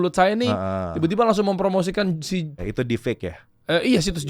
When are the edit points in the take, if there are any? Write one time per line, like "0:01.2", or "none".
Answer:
0:02.6